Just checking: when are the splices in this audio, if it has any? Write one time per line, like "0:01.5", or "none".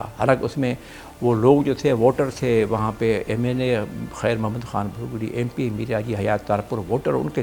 none